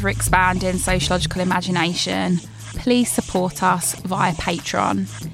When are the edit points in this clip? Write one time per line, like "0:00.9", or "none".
none